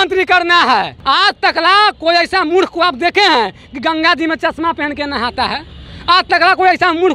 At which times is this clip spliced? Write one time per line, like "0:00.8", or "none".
0:00.9